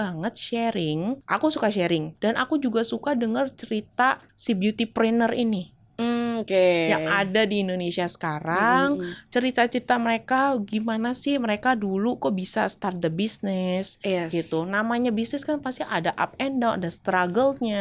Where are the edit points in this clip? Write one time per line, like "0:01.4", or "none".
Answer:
0:01.2
0:02.1
0:04.3